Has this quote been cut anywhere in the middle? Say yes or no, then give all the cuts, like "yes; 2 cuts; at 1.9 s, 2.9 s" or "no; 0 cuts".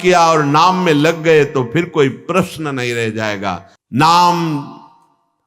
yes; 1 cut; at 3.7 s